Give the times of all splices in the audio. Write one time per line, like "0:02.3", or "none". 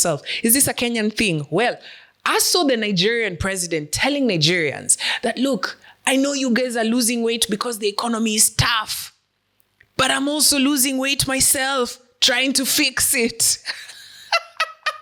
none